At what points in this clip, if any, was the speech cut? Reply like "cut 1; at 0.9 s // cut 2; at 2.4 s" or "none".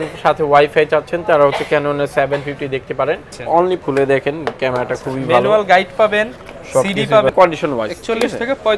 cut 1; at 3.5 s // cut 2; at 7.3 s